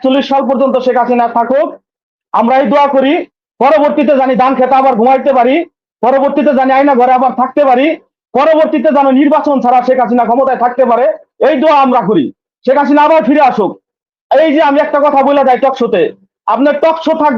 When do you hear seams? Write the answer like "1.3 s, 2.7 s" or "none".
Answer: none